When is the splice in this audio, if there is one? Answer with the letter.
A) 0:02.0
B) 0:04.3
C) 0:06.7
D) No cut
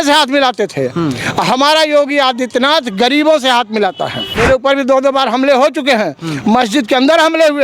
B